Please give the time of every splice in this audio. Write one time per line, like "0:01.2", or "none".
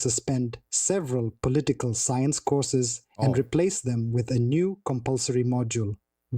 0:00.9